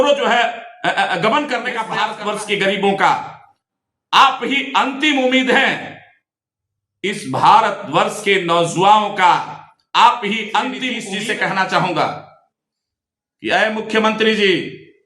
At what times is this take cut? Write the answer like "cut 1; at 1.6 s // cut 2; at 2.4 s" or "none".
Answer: cut 1; at 1.9 s // cut 2; at 11.0 s